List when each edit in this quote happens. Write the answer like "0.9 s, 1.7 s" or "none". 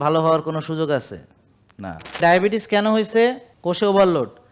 2.2 s, 3.5 s